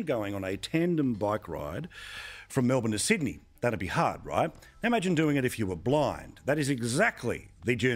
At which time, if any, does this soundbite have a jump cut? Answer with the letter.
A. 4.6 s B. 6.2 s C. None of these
C